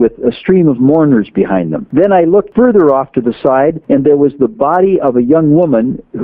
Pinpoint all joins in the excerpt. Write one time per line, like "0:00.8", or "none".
0:01.8
0:02.5
0:03.8